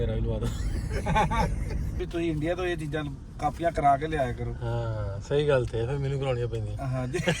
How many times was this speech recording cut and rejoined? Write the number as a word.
one